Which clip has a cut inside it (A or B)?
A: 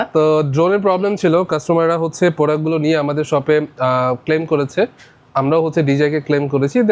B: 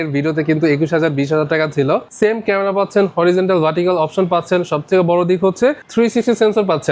B